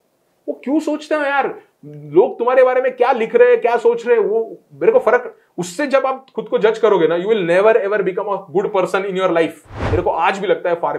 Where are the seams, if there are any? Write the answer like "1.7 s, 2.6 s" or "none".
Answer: 9.8 s